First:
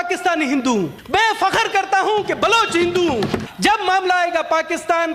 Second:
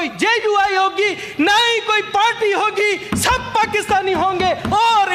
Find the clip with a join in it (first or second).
first